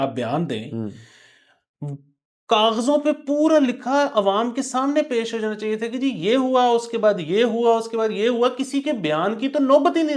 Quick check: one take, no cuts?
yes; 0 cuts

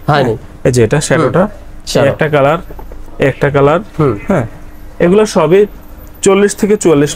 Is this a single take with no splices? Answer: yes; 0 cuts

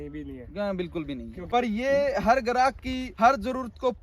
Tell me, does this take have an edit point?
yes; 2 cuts; at 1.3 s, 3.0 s

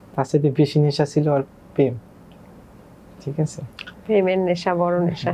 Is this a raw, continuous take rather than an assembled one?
yes; 0 cuts

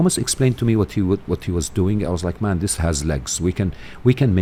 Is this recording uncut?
yes; 0 cuts

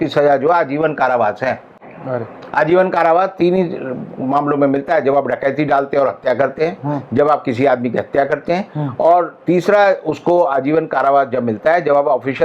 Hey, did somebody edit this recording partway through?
no; 0 cuts

